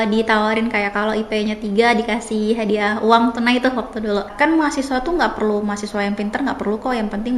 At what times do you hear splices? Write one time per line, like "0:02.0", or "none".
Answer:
0:04.3

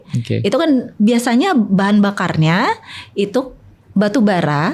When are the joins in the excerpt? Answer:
none

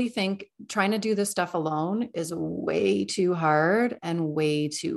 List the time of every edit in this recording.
none

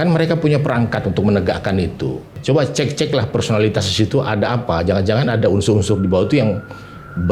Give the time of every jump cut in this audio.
0:02.3

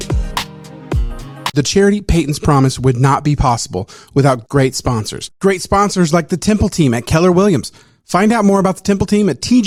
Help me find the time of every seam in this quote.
none

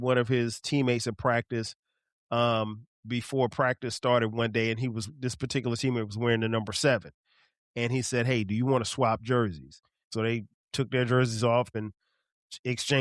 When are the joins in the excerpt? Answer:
0:10.1
0:11.7

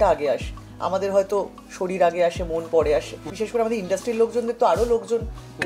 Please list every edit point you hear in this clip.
0:03.3

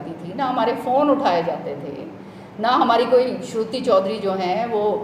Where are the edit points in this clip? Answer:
none

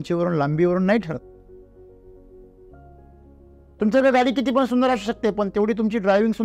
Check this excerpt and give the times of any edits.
none

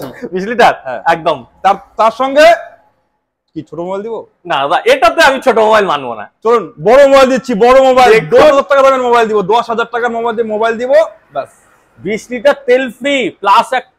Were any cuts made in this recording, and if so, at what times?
none

